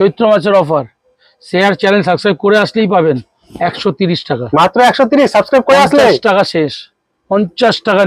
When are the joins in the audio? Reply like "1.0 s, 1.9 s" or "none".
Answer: none